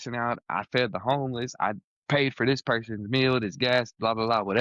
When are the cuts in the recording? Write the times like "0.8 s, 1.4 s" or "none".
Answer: none

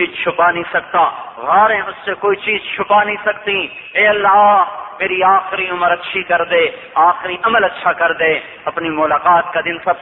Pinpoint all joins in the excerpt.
8.5 s

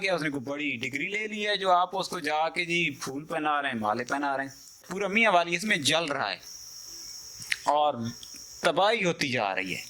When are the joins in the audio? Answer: 4.9 s

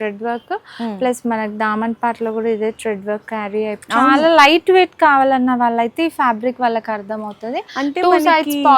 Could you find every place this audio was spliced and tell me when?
3.8 s

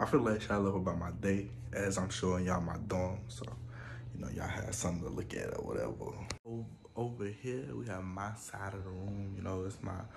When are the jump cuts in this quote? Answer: 6.3 s

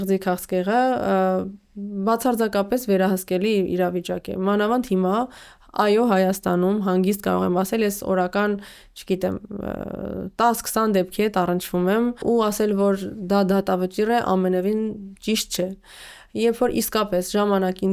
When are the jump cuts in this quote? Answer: none

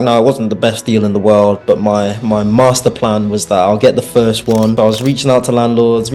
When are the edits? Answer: 4.7 s

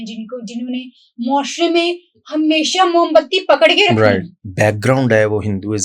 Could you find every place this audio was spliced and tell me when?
4.4 s

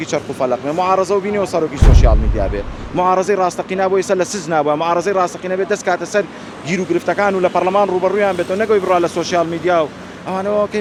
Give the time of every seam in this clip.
none

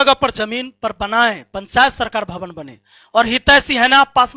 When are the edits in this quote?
none

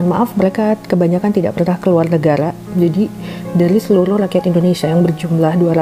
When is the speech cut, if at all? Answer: none

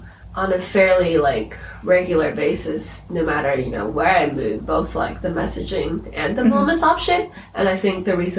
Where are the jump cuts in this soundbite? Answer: 7.3 s

